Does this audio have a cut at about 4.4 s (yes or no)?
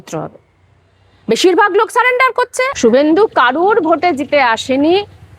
no